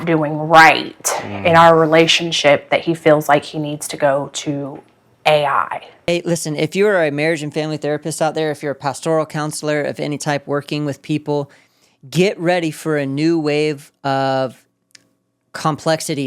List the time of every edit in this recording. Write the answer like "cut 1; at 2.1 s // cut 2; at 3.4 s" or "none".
cut 1; at 6.1 s